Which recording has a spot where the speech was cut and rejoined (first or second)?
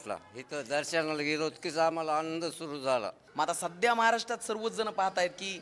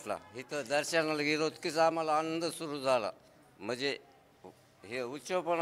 first